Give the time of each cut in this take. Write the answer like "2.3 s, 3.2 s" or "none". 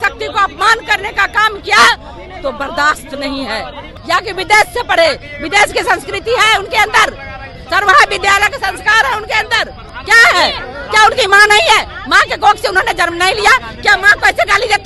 3.9 s